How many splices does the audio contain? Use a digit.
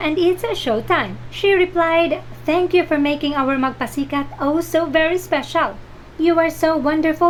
0